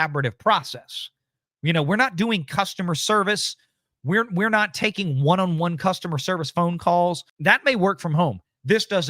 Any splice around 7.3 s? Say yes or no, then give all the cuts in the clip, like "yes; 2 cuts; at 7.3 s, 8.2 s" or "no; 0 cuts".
yes; 1 cut; at 7.3 s